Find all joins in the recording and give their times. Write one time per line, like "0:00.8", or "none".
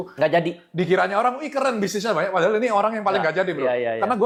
none